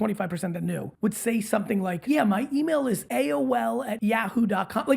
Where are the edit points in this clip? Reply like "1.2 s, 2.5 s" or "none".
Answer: 0.9 s, 2.0 s, 3.0 s, 3.9 s